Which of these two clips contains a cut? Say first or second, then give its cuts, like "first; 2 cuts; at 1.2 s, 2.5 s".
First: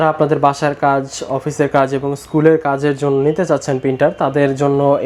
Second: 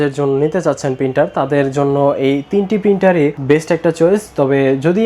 second; 1 cut; at 3.4 s